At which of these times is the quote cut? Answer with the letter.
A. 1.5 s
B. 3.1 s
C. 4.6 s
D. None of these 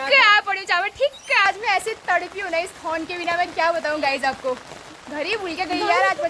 A